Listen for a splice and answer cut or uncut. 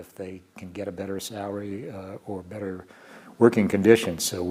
uncut